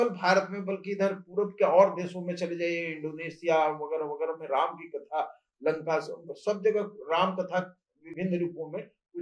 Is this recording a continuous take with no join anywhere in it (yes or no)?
yes